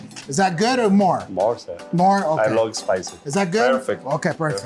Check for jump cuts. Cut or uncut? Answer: uncut